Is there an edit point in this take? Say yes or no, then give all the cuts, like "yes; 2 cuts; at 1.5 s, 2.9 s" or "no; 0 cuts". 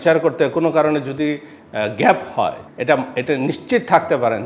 yes; 1 cut; at 2.7 s